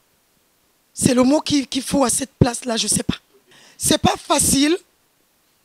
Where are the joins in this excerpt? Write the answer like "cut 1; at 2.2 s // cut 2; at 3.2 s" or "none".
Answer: cut 1; at 3.7 s